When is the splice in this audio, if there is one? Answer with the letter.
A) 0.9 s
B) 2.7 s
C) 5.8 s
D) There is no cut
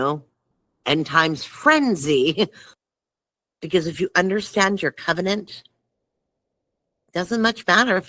B